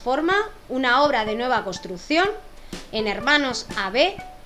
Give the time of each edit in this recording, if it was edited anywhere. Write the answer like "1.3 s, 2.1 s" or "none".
none